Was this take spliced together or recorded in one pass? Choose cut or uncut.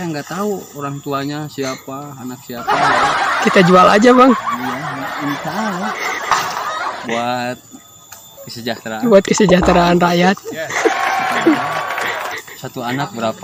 uncut